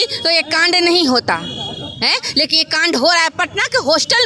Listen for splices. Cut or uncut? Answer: uncut